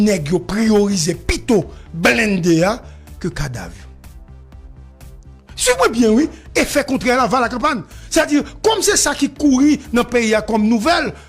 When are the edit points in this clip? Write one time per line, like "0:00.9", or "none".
0:03.8
0:05.6